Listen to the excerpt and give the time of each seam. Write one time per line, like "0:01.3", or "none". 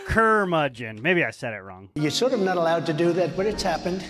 0:01.9